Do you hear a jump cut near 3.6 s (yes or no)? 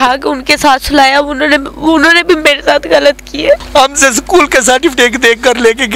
yes